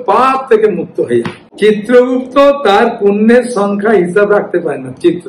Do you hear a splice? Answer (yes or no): yes